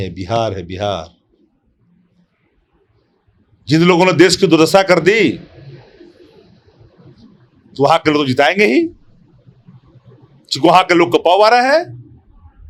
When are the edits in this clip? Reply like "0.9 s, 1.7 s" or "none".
none